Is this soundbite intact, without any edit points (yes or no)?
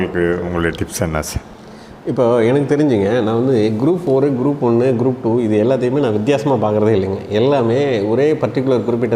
yes